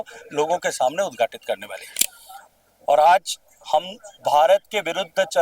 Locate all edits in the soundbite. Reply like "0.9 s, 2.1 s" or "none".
2.0 s